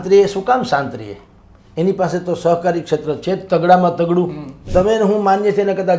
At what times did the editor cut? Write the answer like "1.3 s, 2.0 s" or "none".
4.7 s